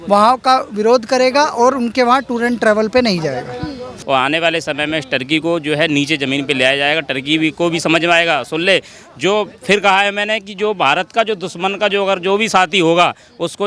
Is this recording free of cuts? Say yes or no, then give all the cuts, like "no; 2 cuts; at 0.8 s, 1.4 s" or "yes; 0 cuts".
no; 1 cut; at 3.9 s